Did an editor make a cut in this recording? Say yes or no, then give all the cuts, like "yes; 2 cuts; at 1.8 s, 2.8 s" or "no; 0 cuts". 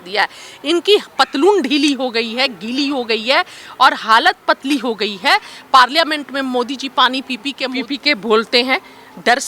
yes; 1 cut; at 7.6 s